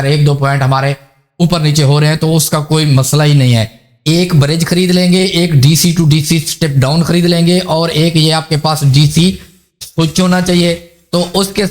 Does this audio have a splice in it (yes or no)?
yes